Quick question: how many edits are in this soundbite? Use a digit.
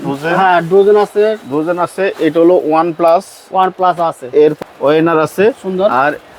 1